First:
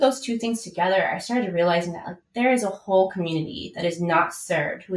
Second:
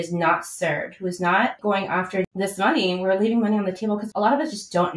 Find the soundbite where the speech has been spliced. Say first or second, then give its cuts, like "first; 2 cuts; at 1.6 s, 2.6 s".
second; 2 cuts; at 2.0 s, 4.1 s